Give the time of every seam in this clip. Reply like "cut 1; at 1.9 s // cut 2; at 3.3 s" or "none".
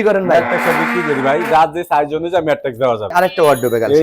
cut 1; at 3.1 s